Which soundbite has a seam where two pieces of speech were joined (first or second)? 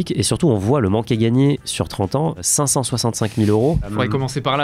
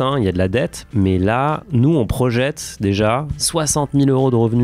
second